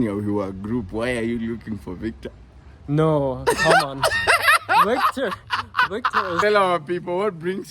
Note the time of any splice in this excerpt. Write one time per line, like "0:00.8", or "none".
0:06.4

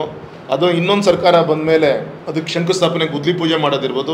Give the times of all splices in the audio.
0:02.2

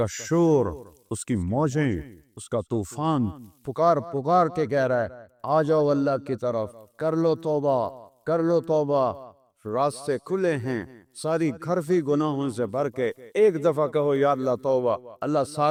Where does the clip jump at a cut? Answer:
none

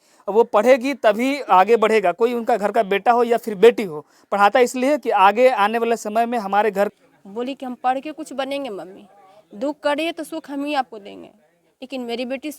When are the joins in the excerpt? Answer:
0:06.9

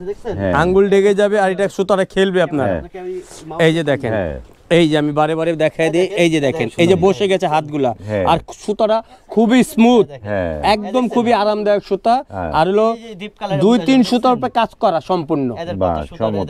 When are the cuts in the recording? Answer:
none

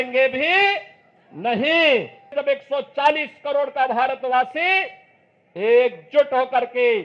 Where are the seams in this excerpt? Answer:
0:02.4

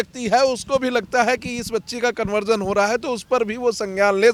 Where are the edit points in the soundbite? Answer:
none

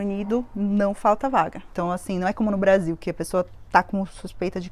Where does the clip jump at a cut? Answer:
0:01.6

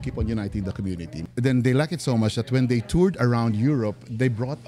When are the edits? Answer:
0:01.1

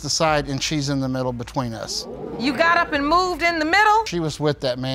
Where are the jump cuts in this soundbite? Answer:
none

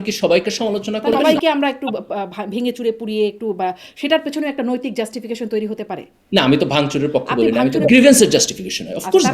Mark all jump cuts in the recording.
0:01.2
0:06.1
0:07.9

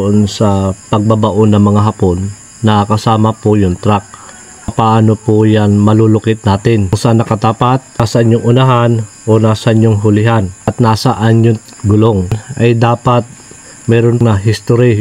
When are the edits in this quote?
0:04.7
0:07.0
0:08.0
0:10.7
0:12.5
0:14.2

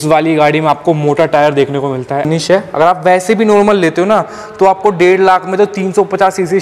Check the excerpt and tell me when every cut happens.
0:02.3

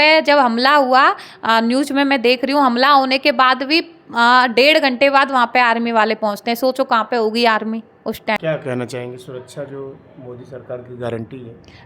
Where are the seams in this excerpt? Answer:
0:08.4

